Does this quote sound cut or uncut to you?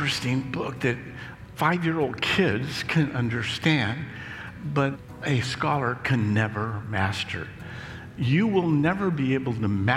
cut